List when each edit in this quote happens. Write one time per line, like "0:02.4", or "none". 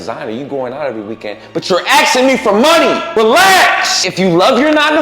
0:03.0
0:04.0